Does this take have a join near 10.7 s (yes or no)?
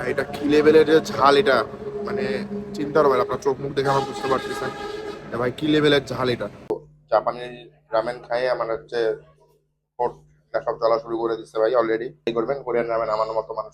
no